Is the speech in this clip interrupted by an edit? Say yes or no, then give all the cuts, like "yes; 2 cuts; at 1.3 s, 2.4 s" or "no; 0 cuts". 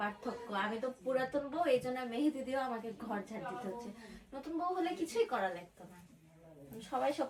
no; 0 cuts